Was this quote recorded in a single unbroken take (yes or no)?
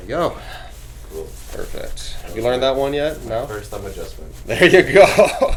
yes